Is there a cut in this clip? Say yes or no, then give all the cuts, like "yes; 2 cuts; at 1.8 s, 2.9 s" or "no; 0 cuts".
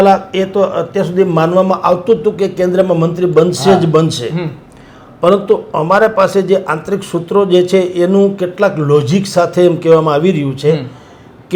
no; 0 cuts